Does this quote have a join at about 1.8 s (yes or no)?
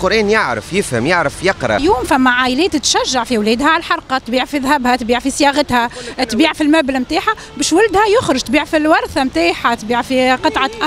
yes